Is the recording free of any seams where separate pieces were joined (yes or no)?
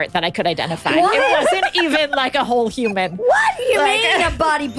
yes